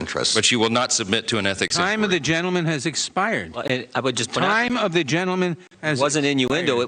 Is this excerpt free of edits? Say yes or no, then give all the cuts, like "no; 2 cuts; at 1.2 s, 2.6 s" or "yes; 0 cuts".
yes; 0 cuts